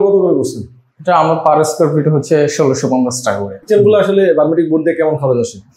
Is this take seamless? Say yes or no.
no